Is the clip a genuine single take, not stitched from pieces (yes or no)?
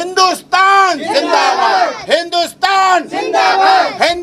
yes